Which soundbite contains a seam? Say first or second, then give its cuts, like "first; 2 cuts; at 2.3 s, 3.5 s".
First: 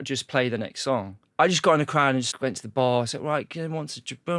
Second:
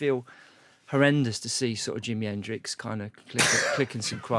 first; 2 cuts; at 1.2 s, 2.3 s